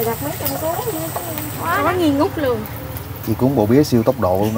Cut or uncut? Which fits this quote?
cut